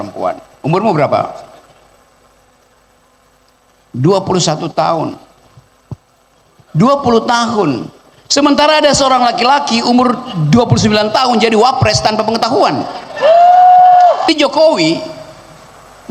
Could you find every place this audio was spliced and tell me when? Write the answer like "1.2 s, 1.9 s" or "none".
14.3 s